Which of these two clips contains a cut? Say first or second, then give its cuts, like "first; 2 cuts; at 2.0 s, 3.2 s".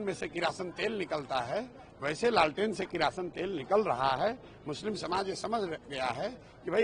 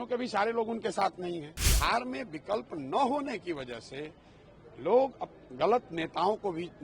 second; 1 cut; at 1.6 s